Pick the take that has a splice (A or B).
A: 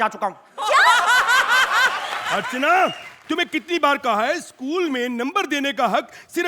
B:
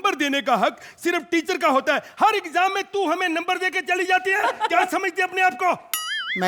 A